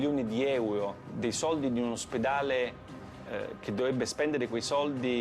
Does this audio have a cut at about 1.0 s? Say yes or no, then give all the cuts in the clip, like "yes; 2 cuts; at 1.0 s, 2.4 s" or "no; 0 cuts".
yes; 1 cut; at 1.0 s